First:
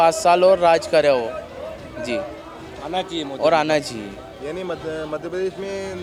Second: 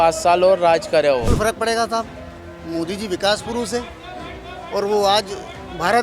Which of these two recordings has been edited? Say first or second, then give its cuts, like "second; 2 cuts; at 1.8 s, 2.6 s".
second; 1 cut; at 1.3 s